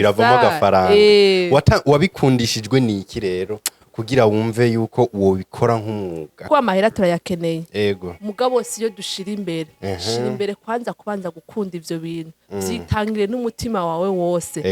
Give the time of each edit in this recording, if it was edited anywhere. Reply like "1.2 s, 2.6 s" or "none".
6.5 s